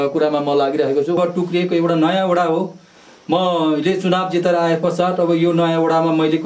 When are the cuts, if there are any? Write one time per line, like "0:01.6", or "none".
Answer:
0:01.2